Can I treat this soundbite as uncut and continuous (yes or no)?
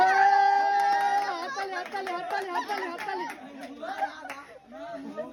yes